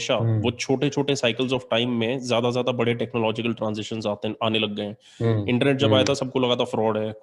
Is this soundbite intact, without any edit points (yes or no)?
yes